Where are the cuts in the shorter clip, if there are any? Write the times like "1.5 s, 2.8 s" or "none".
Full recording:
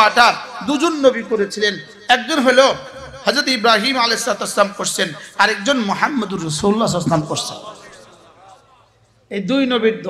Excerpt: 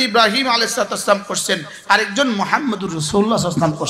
none